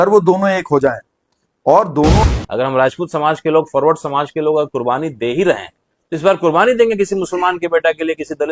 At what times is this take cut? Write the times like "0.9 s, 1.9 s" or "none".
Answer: 2.2 s